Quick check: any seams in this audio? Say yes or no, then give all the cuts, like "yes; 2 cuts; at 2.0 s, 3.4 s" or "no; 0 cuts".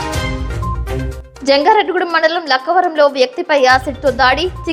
yes; 1 cut; at 0.9 s